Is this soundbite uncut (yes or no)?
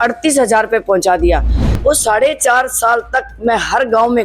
no